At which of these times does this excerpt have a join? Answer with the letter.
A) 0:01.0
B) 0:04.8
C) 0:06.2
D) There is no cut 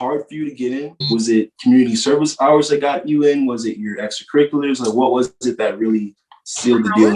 D